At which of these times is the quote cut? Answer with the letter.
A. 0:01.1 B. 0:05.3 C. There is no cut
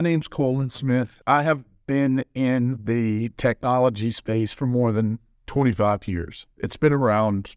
A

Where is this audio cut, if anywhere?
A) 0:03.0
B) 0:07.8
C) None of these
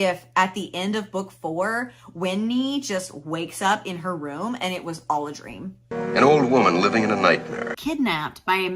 B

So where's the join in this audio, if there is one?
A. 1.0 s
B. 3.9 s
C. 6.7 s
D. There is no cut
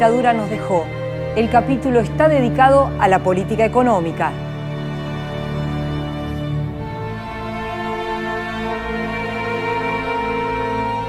B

